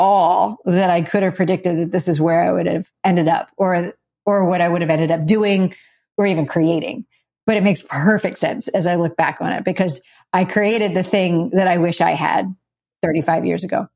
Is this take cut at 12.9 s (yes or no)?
yes